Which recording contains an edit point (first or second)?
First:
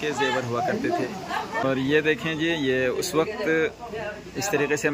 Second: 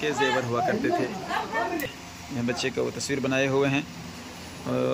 first